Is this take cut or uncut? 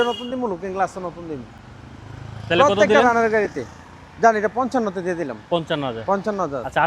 uncut